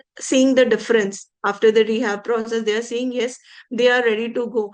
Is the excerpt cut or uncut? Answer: uncut